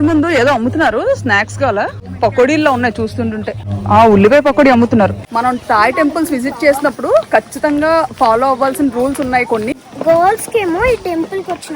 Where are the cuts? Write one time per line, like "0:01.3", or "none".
0:02.0
0:03.7
0:05.2
0:09.7